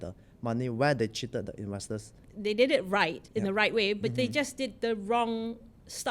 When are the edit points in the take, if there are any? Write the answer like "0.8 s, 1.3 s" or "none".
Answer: 2.2 s, 3.2 s